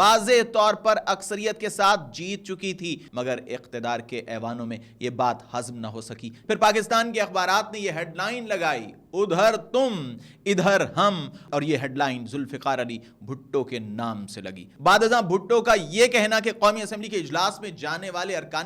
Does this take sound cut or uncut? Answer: cut